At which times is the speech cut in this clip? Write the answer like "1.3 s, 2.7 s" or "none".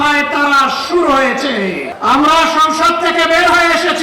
1.9 s